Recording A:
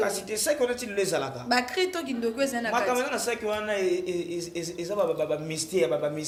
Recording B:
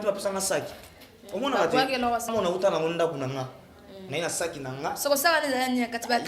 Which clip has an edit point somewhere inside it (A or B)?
B